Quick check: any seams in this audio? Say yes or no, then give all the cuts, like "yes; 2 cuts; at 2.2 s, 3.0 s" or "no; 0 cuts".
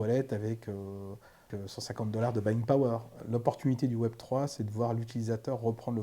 yes; 2 cuts; at 1.5 s, 3.2 s